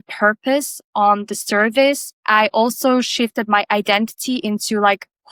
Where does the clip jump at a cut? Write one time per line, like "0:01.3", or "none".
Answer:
none